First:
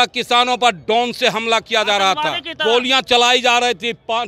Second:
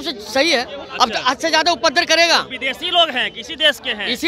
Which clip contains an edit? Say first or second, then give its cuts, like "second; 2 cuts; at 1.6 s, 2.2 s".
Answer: first; 1 cut; at 2.5 s